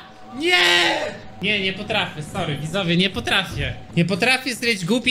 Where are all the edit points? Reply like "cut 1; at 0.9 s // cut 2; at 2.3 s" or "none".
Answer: cut 1; at 1.3 s // cut 2; at 3.8 s